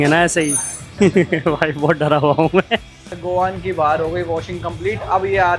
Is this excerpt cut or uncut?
cut